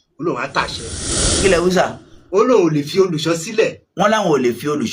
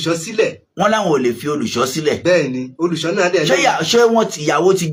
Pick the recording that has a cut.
first; 1 cut; at 1.3 s

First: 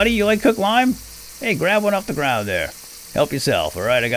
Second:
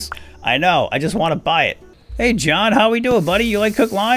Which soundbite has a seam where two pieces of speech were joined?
second; 1 cut; at 2.1 s

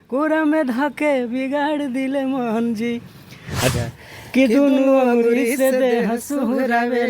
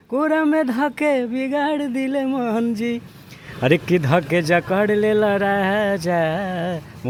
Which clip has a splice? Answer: first; 1 cut; at 3.7 s

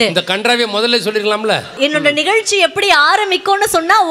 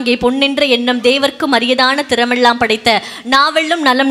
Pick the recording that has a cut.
first; 1 cut; at 1.8 s

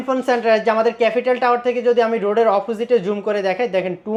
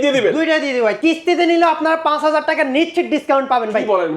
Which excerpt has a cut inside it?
second; 1 cut; at 1.0 s

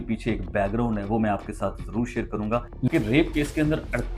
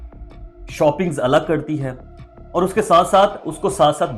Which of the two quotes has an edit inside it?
first; 1 cut; at 2.8 s

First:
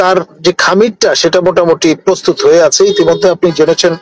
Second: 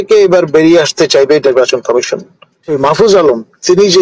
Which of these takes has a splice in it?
second; 1 cut; at 2.6 s

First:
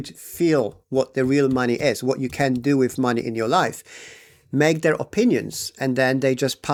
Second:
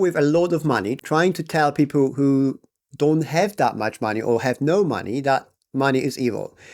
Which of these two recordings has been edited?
second; 1 cut; at 1.0 s

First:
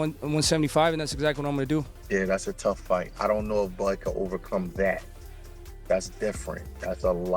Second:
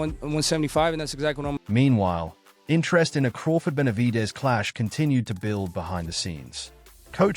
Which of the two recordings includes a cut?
first; 1 cut; at 1.6 s

